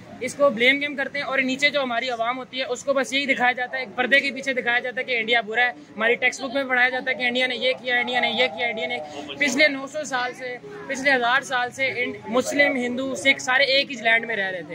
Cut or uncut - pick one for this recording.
uncut